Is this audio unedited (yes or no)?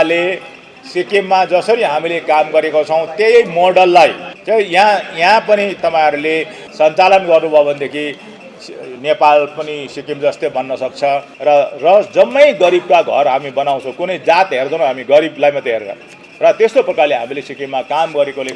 no